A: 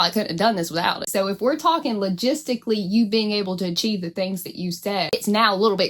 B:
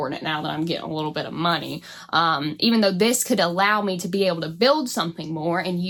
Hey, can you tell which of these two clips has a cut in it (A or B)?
A